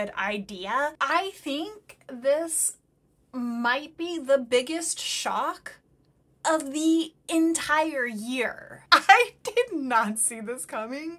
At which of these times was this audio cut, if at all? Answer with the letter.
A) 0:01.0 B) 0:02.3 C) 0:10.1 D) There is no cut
A